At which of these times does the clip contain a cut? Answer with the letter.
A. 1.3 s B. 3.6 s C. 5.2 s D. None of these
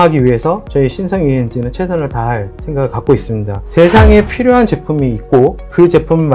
B